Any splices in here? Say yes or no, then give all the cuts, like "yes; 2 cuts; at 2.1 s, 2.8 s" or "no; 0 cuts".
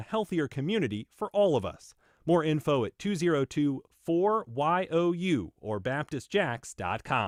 no; 0 cuts